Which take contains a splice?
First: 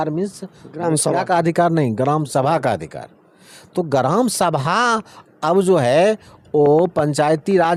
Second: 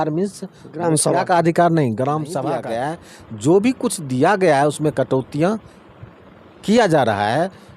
second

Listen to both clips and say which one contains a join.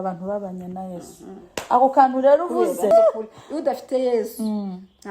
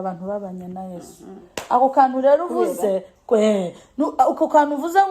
first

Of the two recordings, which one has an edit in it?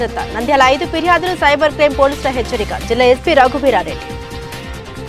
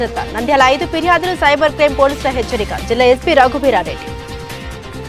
first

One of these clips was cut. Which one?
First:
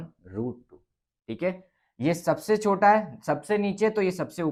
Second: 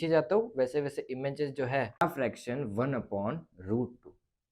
second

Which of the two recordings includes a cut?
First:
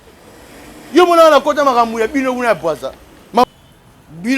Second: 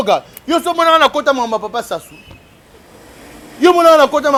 first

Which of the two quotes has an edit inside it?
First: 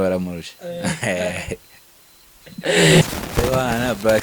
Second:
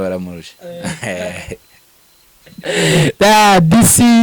first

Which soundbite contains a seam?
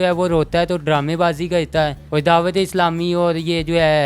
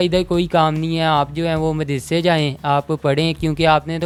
first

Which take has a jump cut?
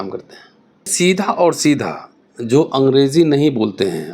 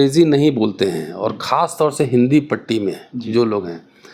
first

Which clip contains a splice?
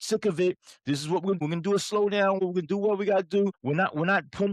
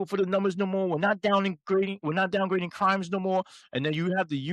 first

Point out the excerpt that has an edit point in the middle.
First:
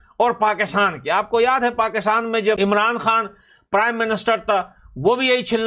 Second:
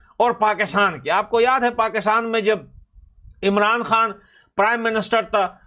first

